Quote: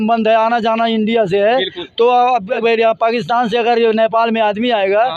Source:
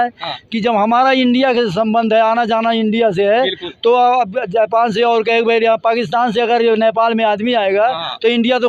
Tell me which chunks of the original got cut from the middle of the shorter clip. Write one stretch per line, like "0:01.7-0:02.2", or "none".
0:04.4-0:05.4